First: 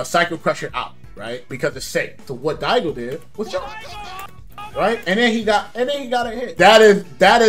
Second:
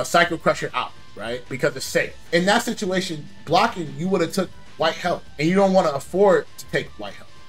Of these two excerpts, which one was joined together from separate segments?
first; 2 cuts; at 2.2 s, 6.4 s

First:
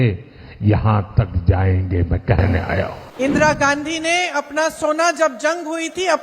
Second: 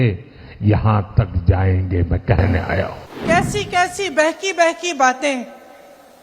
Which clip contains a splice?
first; 1 cut; at 3.0 s

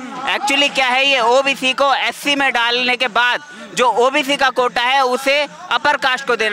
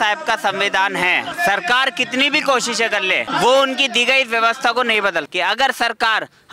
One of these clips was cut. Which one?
second; 3 cuts; at 1.3 s, 3.3 s, 5.3 s

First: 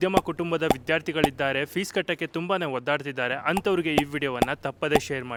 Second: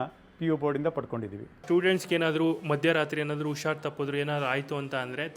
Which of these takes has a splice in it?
second; 1 cut; at 1.6 s

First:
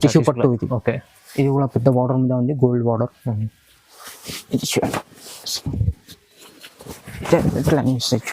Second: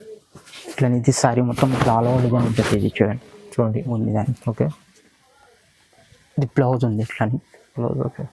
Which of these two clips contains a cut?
second; 1 cut; at 3.9 s

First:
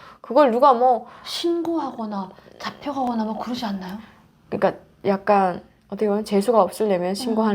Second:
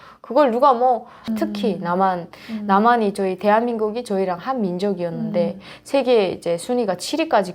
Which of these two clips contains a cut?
second; 1 cut; at 1.2 s

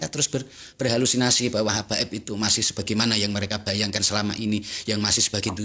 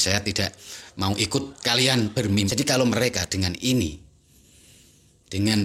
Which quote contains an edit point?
second; 1 cut; at 2.5 s

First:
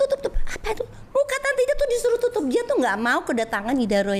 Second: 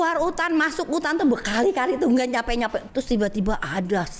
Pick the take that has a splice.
second; 1 cut; at 2.9 s

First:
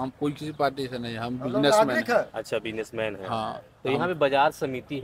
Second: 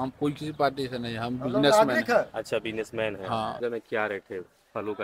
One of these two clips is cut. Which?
second; 1 cut; at 3.6 s

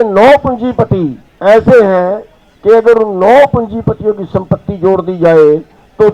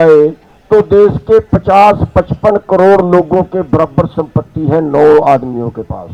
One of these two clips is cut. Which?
first; 1 cut; at 1.2 s

